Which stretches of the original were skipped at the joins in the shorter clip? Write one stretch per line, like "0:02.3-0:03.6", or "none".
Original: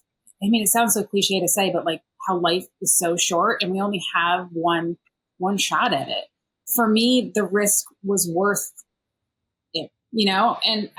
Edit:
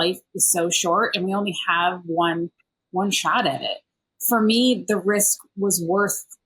none